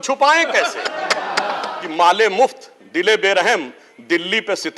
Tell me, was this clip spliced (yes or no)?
yes